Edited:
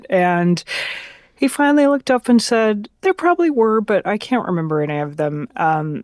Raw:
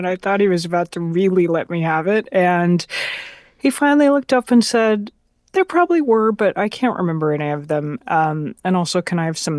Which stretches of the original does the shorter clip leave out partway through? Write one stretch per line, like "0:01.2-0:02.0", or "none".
0:05.1-0:05.4